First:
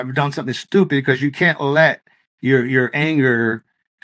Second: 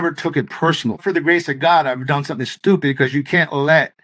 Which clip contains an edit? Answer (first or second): second